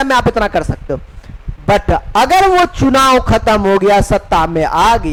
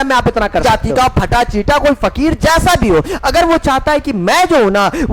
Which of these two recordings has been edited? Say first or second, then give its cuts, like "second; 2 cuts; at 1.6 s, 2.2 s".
second; 1 cut; at 1.1 s